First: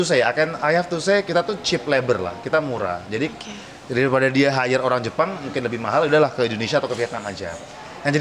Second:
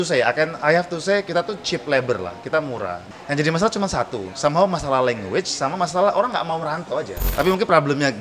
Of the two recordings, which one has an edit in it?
second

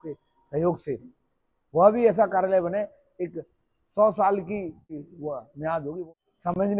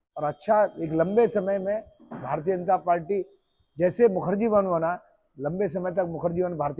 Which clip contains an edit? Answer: first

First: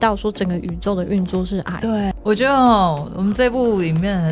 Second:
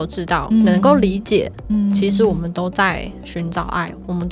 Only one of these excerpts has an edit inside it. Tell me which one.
first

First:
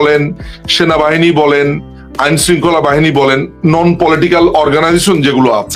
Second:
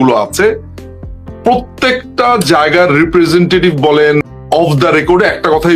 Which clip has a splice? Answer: second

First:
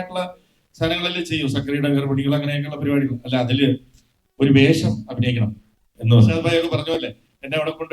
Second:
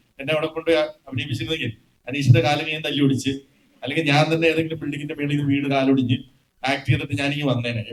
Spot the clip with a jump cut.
first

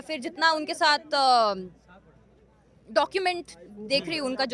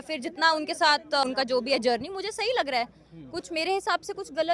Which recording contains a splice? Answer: second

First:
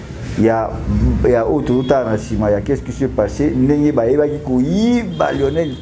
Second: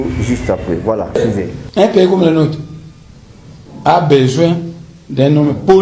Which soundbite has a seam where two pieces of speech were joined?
second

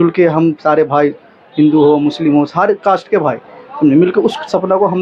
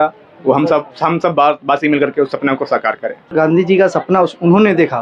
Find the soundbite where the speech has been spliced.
second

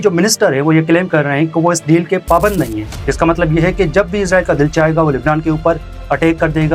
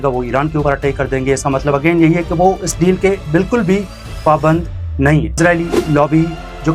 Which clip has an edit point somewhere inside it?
second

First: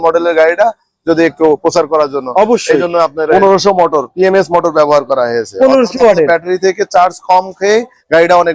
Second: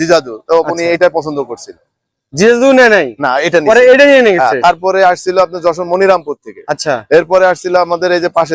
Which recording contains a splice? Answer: first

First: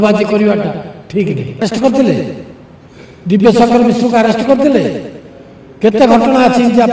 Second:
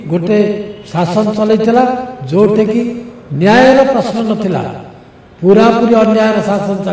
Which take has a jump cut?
first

